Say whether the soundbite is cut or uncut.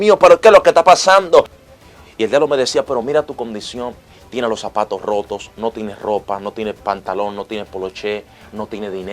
cut